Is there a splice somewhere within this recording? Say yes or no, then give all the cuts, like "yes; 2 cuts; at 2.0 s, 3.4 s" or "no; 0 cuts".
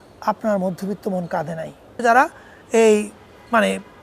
yes; 1 cut; at 2.0 s